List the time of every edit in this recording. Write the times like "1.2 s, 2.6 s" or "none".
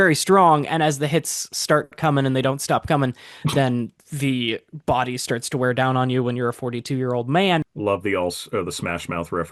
7.7 s